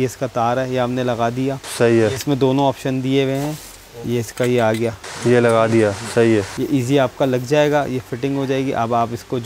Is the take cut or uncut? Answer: uncut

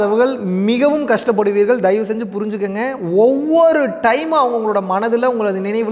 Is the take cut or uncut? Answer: uncut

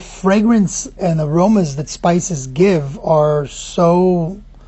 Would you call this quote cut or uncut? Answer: cut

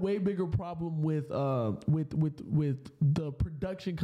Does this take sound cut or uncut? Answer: uncut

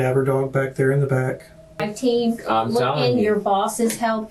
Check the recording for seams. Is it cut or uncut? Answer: cut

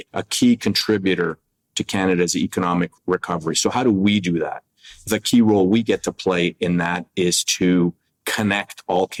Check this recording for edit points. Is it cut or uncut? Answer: uncut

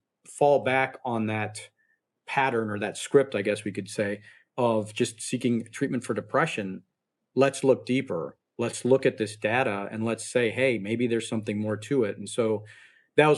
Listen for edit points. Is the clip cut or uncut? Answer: uncut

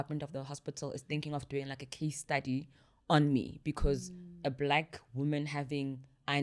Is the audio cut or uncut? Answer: uncut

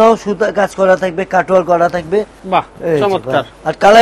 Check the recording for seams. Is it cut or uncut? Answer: cut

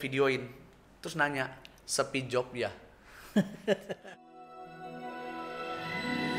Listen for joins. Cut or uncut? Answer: cut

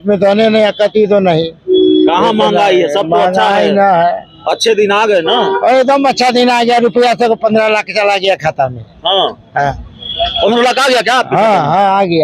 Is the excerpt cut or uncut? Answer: uncut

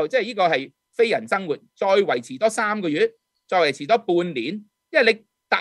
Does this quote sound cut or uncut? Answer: uncut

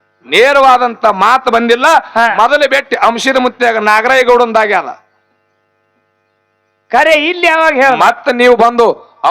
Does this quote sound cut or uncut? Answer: uncut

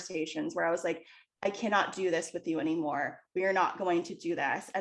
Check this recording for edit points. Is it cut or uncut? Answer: uncut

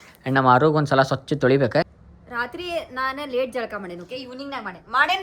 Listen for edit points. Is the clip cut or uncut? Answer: cut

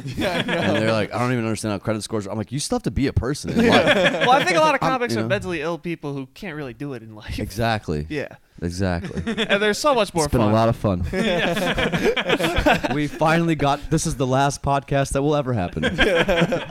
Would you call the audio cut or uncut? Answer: cut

